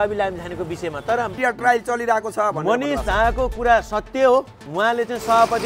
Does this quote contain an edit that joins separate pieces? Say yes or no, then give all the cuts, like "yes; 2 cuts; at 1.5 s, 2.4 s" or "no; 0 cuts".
yes; 1 cut; at 1.4 s